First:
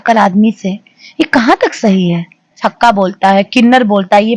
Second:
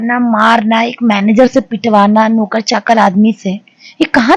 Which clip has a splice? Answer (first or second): first